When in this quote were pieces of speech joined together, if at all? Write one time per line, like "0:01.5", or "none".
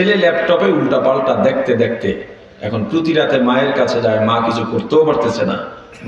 none